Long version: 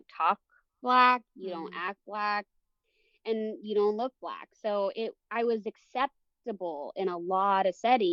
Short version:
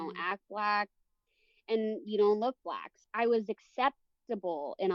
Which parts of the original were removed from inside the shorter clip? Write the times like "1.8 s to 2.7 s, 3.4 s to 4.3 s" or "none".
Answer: 4.5 s to 5.1 s